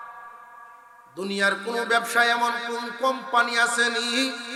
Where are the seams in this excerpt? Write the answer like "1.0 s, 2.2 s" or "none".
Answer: none